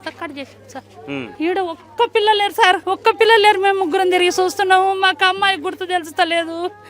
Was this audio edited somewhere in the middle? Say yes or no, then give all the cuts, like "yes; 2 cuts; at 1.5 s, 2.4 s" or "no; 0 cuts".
yes; 2 cuts; at 1.3 s, 2.8 s